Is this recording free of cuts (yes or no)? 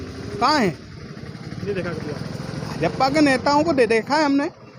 yes